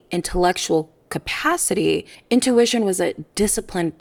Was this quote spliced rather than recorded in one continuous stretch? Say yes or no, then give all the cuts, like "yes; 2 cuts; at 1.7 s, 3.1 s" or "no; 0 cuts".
no; 0 cuts